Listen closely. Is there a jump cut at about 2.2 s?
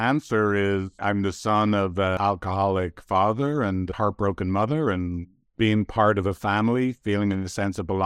yes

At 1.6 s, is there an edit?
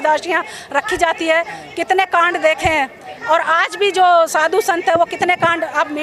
no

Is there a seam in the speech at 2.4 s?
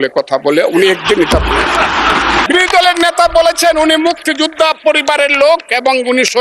yes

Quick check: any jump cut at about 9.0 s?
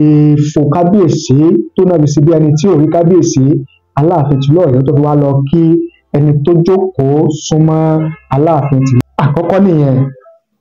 yes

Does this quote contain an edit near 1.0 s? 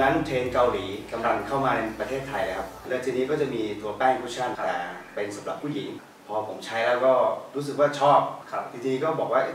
no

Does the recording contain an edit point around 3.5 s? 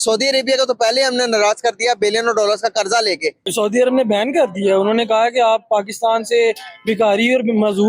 yes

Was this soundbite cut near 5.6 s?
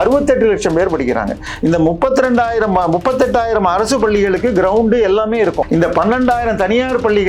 yes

